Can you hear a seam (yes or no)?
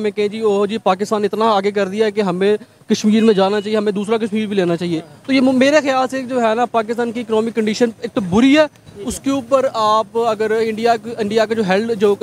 no